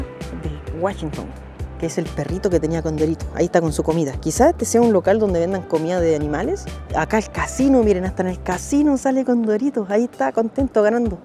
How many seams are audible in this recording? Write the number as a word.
zero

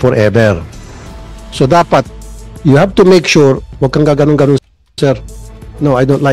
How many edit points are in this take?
two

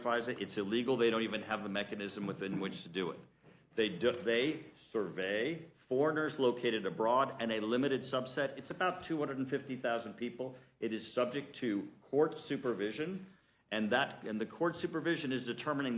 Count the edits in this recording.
one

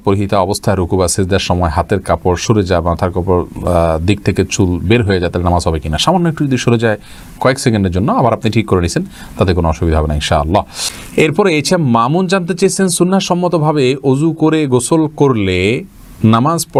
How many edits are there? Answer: zero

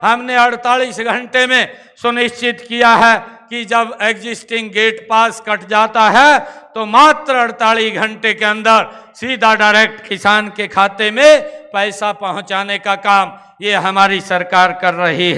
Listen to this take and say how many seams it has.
zero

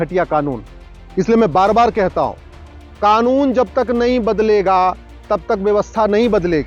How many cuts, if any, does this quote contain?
zero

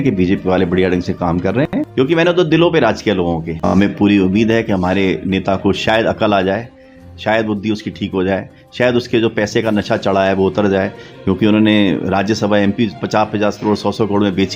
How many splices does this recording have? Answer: two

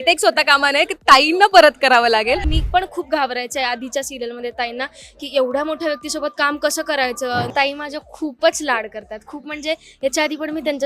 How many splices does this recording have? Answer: two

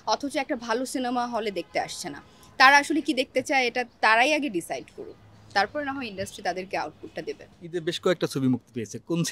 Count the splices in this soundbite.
zero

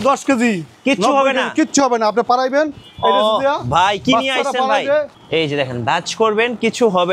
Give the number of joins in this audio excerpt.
one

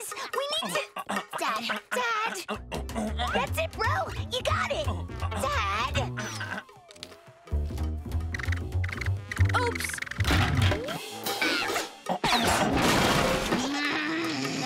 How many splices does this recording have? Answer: three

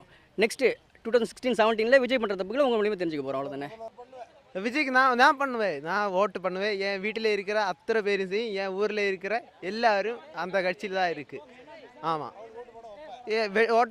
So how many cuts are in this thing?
one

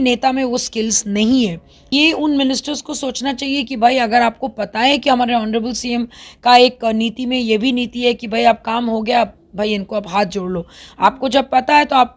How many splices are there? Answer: one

